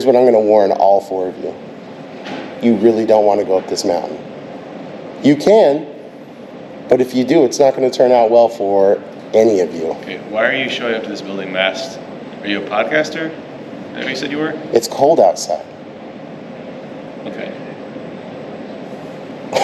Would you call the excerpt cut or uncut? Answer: uncut